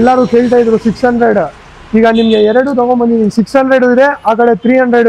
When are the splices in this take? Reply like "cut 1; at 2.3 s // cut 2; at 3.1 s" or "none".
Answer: none